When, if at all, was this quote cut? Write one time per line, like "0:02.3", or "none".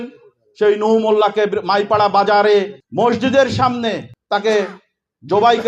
0:02.8
0:04.1